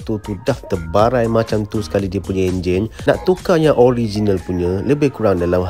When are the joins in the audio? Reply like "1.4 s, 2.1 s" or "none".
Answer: 3.1 s